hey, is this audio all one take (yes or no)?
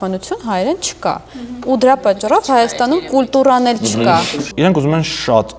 no